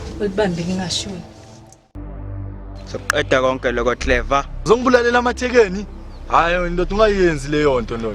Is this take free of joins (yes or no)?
no